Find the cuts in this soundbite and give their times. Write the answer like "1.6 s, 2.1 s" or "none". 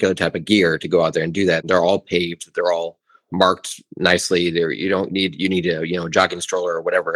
1.6 s